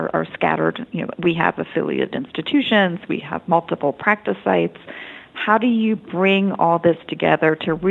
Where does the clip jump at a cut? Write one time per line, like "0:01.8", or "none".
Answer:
none